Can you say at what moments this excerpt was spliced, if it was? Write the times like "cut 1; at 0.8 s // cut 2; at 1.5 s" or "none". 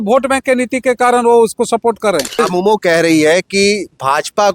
cut 1; at 2.4 s